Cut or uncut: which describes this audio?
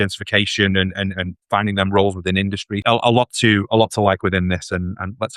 cut